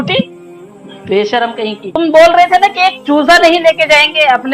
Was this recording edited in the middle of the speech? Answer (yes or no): yes